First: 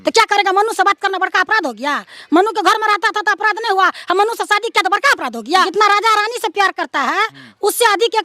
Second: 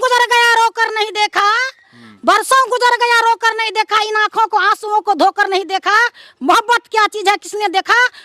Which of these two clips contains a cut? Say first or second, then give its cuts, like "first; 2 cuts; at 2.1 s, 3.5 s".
first; 1 cut; at 5.7 s